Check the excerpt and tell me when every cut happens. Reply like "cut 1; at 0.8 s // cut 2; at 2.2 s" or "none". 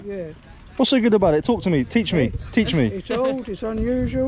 none